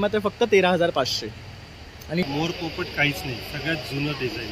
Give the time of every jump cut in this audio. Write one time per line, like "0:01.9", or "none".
0:02.2